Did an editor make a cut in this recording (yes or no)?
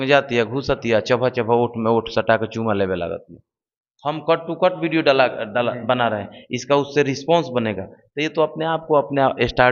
no